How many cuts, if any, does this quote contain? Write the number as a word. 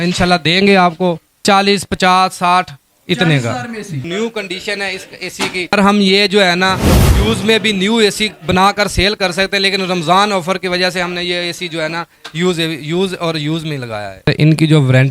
four